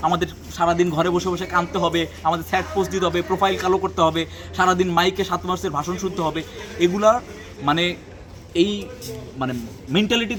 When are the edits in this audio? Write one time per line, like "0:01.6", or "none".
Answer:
none